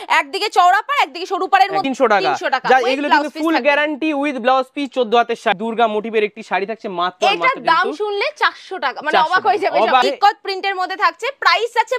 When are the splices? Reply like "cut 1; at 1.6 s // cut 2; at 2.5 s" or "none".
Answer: cut 1; at 1.8 s // cut 2; at 5.6 s // cut 3; at 10.0 s